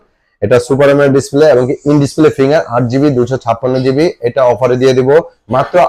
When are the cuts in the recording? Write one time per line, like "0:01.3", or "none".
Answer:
none